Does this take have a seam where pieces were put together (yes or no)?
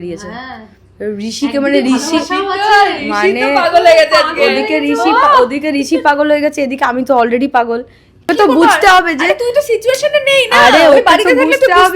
yes